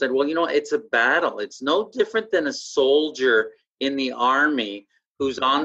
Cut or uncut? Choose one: uncut